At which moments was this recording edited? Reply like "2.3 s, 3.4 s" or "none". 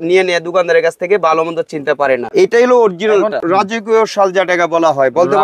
2.3 s, 3.4 s